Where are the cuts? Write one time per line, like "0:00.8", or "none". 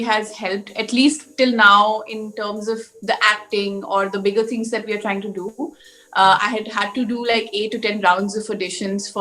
none